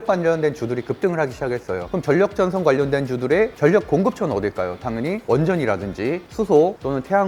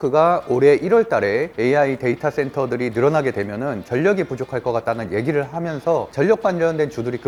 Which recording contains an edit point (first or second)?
first